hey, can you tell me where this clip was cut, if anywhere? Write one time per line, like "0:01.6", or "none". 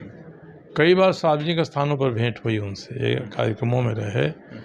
none